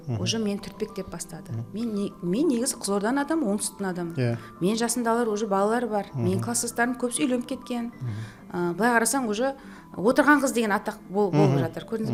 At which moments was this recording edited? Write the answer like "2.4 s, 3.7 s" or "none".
none